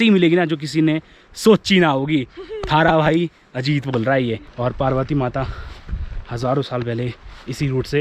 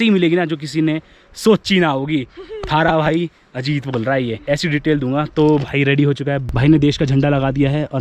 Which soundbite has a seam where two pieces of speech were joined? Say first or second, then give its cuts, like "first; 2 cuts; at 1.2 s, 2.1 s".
first; 1 cut; at 4.4 s